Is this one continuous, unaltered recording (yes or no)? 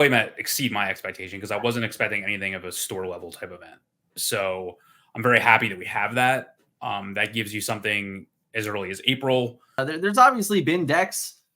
no